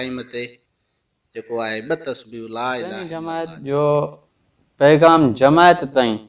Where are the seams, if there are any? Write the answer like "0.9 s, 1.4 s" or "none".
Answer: 3.1 s